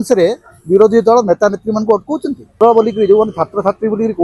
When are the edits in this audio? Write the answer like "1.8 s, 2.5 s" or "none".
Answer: 2.5 s